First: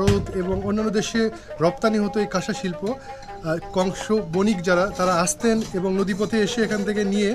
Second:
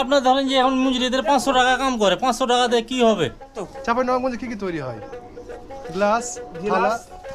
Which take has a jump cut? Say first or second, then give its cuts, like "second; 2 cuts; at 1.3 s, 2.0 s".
second; 1 cut; at 3.6 s